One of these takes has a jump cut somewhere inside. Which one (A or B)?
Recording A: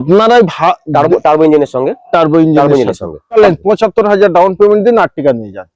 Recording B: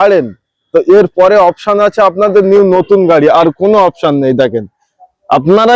A